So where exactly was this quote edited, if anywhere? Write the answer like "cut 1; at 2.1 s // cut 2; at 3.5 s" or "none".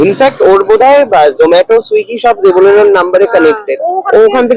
none